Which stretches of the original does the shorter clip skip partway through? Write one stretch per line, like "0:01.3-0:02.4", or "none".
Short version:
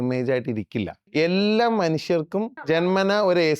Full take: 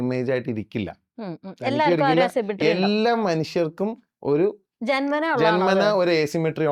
0:01.1-0:02.5
0:04.1-0:05.4